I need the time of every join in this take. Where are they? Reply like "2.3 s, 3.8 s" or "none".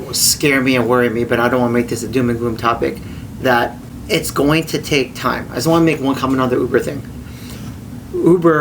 3.9 s